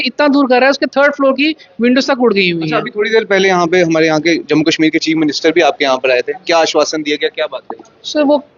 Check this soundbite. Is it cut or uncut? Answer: uncut